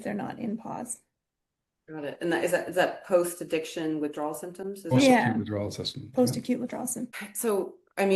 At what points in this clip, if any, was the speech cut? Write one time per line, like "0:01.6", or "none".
0:07.1